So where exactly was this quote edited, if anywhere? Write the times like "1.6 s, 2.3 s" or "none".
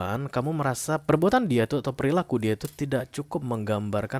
1.0 s